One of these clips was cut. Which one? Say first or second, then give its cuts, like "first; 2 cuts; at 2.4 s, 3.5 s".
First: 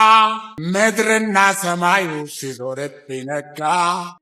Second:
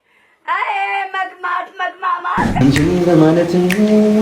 second; 1 cut; at 2.6 s